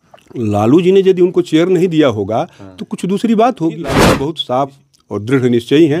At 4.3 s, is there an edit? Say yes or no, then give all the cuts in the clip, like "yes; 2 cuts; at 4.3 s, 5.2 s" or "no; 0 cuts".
yes; 1 cut; at 4.3 s